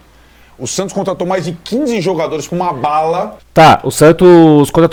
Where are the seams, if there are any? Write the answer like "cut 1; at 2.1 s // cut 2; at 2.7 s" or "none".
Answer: none